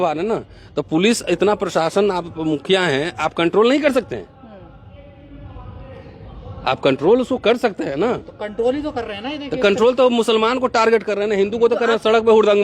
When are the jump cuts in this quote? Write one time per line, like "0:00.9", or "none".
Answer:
none